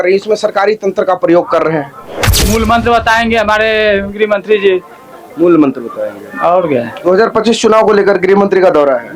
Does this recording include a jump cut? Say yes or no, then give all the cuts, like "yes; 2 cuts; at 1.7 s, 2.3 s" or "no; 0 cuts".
yes; 1 cut; at 2.2 s